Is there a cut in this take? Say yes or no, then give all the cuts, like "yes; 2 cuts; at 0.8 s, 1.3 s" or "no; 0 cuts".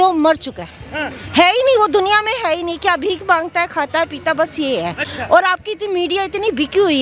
no; 0 cuts